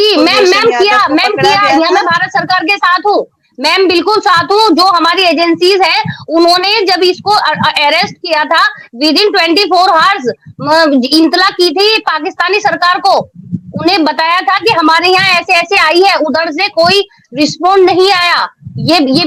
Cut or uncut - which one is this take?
uncut